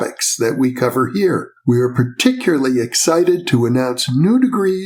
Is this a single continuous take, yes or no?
yes